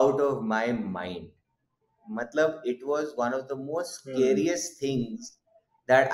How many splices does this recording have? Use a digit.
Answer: 0